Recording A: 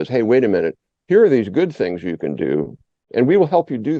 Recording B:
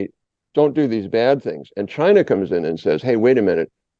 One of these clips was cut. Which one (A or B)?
A